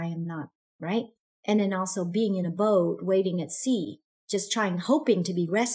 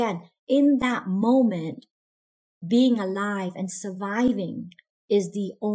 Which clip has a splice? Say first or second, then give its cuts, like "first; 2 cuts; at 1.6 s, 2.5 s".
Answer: first; 1 cut; at 1.3 s